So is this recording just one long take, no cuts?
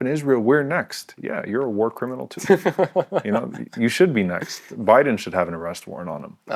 yes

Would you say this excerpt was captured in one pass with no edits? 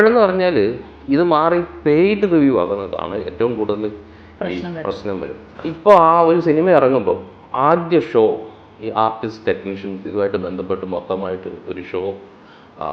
no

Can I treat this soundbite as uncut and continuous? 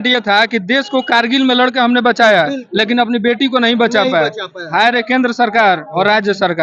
yes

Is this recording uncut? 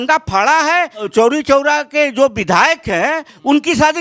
no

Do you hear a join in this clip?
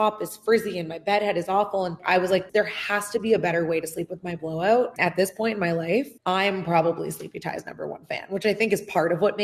yes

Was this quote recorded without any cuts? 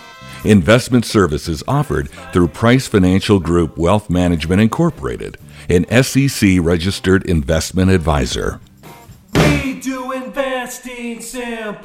no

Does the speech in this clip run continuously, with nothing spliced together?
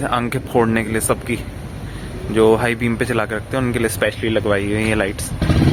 yes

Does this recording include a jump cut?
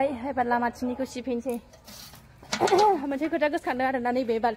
no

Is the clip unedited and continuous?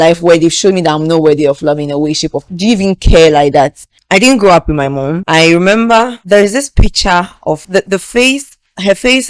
no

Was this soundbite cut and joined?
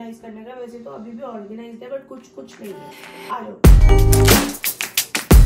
no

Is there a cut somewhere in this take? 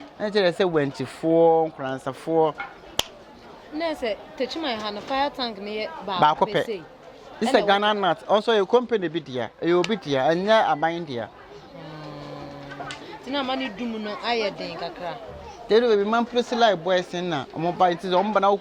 no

